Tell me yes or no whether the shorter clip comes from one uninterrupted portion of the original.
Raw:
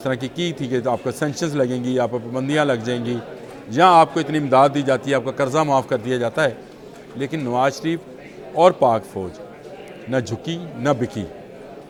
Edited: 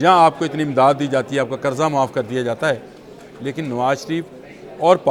yes